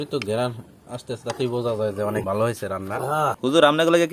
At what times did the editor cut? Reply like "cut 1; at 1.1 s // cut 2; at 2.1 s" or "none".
cut 1; at 2.2 s // cut 2; at 3.4 s